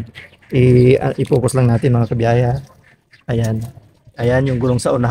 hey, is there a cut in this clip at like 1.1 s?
no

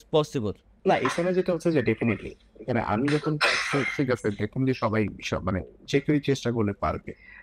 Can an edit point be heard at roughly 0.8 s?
no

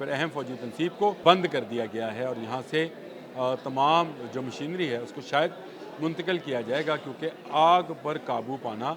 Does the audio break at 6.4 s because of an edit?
no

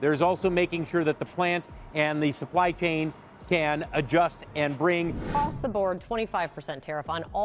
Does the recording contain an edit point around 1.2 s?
no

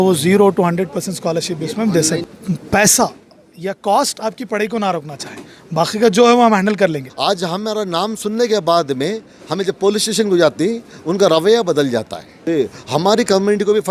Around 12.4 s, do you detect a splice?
yes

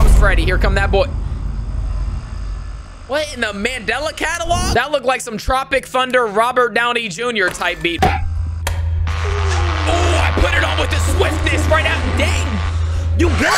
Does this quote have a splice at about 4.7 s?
yes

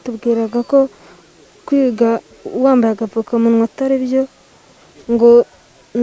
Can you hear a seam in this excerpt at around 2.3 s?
no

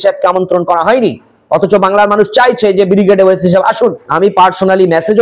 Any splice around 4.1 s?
yes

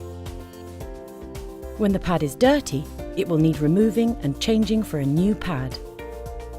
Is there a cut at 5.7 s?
yes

